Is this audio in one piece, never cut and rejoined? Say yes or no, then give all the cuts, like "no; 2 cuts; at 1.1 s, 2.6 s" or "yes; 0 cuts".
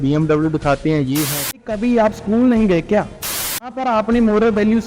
no; 2 cuts; at 1.7 s, 3.6 s